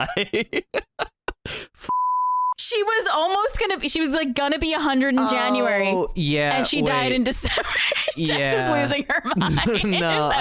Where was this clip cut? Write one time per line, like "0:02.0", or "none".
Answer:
none